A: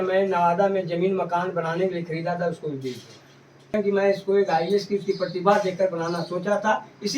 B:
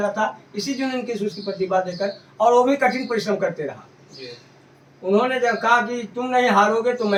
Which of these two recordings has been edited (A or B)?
A